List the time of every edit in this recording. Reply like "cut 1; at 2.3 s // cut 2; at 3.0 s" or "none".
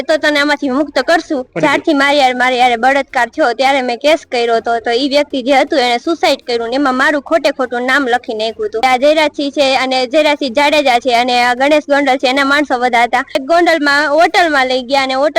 cut 1; at 1.5 s // cut 2; at 8.8 s // cut 3; at 13.4 s